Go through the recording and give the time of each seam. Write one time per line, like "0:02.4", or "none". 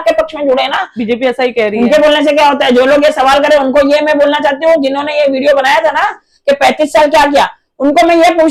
0:01.0